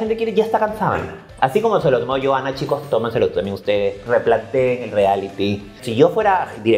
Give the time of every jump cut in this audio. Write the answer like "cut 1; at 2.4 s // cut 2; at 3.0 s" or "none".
cut 1; at 1.2 s // cut 2; at 5.8 s